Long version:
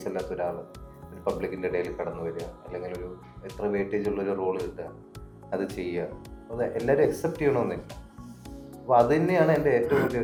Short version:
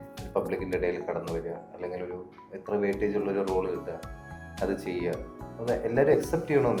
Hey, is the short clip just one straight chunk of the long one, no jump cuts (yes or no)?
yes